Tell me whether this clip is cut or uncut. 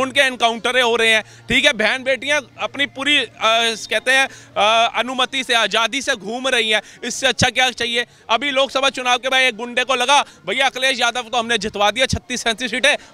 uncut